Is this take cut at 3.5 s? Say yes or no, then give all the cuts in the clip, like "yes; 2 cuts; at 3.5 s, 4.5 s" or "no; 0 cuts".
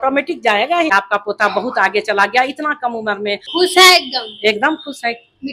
yes; 2 cuts; at 0.9 s, 3.5 s